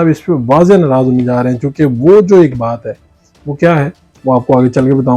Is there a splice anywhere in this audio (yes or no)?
no